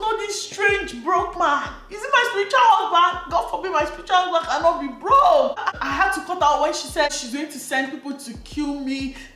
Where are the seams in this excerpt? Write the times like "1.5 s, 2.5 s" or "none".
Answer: 5.7 s, 7.1 s